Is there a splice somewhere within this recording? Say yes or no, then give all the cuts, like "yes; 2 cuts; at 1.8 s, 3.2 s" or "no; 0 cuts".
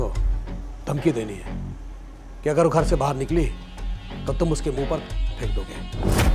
no; 0 cuts